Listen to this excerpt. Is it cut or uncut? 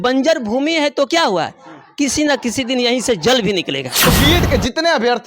cut